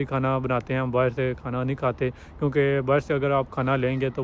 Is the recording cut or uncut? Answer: uncut